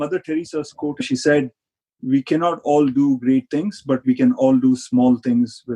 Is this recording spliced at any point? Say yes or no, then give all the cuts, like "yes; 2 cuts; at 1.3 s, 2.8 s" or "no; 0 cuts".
yes; 1 cut; at 0.9 s